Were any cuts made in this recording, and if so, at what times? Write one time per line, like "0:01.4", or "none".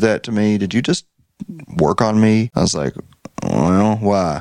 0:02.5